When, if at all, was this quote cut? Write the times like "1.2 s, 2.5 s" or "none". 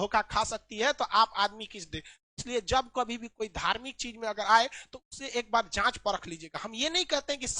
none